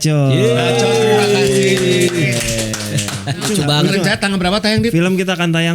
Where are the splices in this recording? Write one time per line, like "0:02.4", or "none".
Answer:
0:03.4